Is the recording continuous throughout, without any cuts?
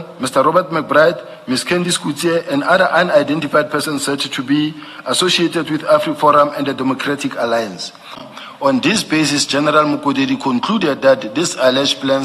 no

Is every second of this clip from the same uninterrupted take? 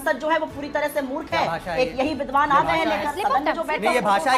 yes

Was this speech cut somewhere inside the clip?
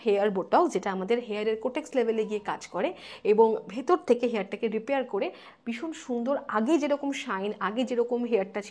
no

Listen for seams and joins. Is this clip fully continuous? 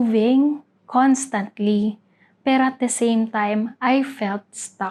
yes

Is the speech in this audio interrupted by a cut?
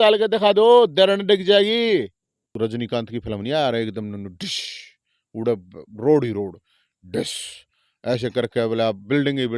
yes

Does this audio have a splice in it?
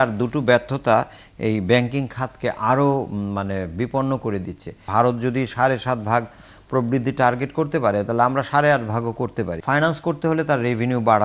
yes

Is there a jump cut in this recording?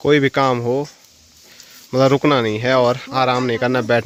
no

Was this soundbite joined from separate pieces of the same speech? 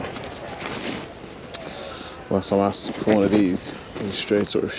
no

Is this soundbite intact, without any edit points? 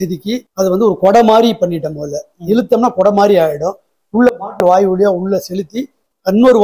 yes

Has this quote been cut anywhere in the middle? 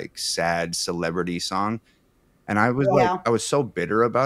no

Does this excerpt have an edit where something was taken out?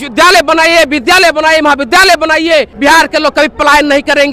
yes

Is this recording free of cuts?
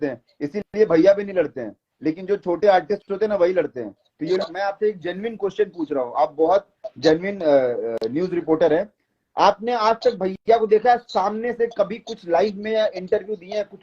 no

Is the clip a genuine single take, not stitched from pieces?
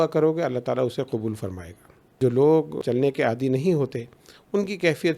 no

